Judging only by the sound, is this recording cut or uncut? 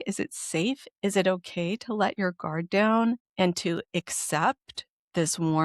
cut